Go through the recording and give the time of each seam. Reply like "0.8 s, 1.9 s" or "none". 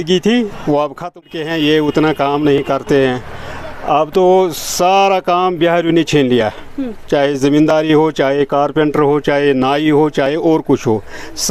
1.2 s